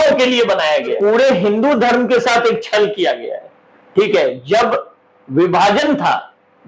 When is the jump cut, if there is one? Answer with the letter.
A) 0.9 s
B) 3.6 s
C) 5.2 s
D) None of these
A